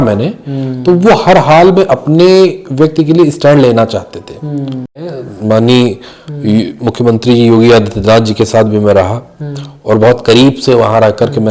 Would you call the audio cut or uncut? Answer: cut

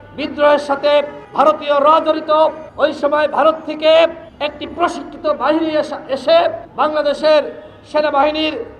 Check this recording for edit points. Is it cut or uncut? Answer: cut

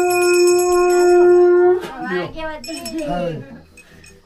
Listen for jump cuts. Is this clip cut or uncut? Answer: uncut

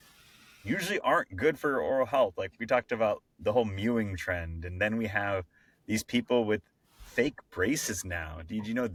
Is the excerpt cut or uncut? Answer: uncut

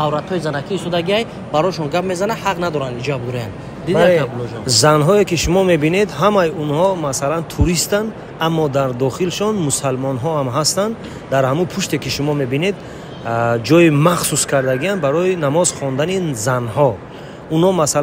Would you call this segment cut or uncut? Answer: uncut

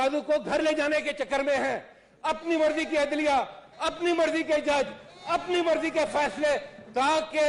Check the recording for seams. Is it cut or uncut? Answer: uncut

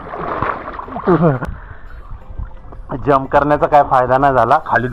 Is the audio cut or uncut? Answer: cut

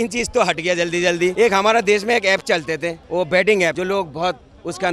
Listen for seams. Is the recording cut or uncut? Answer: cut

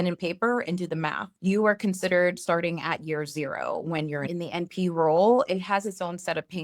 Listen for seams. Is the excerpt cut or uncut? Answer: cut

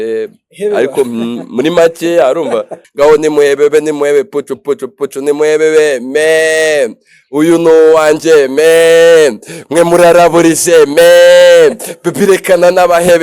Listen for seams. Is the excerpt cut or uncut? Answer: cut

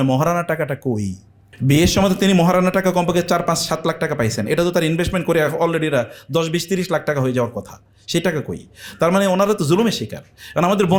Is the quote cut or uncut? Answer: uncut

